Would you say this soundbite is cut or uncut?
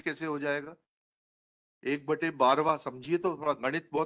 uncut